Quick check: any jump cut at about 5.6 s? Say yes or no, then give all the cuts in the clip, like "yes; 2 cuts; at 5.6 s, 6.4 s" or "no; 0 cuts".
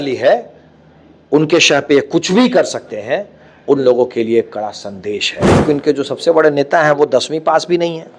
yes; 1 cut; at 5.6 s